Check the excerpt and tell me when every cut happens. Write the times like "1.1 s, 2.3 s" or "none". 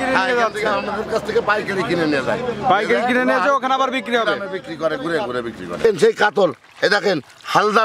5.8 s